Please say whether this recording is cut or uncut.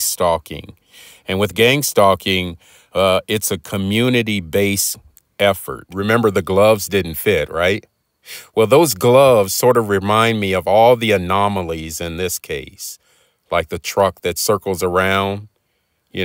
cut